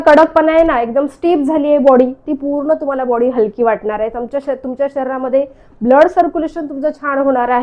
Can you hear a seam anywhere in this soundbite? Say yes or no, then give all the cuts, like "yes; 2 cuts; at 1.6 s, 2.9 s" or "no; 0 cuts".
no; 0 cuts